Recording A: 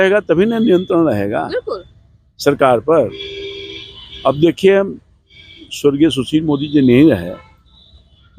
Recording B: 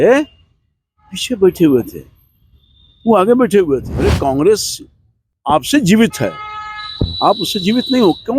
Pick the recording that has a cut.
B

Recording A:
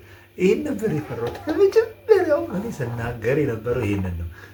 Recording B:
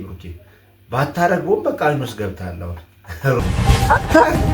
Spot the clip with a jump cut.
B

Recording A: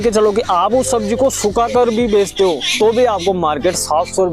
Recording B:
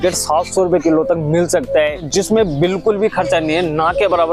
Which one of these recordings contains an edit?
B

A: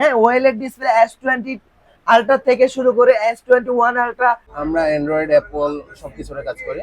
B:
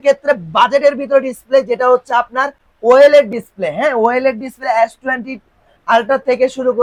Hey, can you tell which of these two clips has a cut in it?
A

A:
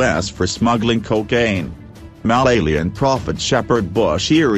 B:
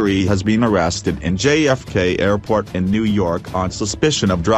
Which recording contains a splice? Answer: A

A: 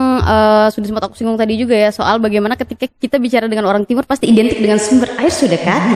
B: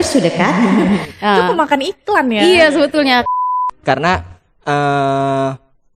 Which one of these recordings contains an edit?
B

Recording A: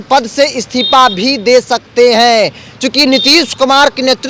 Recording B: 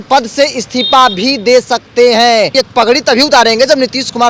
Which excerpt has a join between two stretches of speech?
B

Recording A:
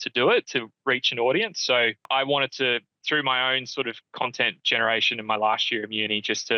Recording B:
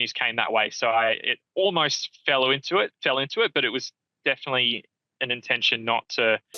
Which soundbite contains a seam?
A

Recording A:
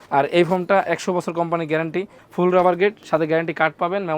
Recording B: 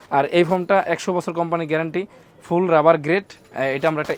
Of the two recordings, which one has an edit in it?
A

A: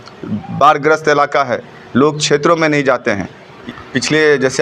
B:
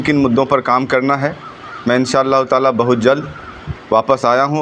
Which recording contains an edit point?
A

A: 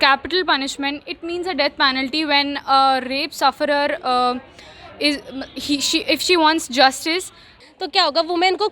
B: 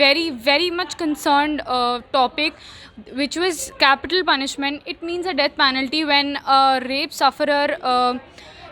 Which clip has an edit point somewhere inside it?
A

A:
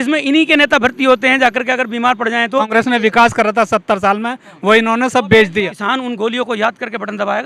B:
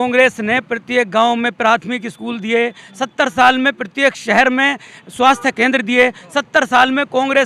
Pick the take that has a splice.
A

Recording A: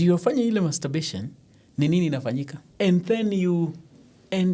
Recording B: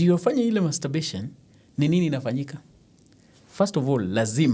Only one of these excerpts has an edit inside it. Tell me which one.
A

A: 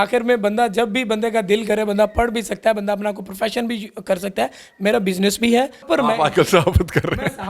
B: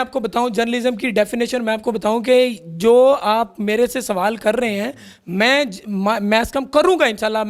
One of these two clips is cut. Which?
A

